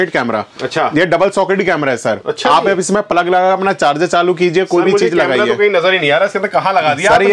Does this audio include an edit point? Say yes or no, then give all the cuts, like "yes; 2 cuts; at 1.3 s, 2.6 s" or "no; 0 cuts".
no; 0 cuts